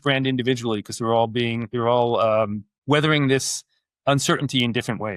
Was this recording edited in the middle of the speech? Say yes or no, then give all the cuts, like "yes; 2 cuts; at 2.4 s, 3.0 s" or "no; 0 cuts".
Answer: yes; 1 cut; at 2.7 s